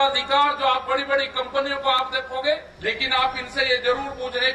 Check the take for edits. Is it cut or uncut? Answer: cut